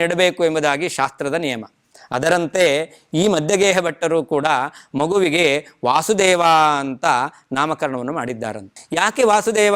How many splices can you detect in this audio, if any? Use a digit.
1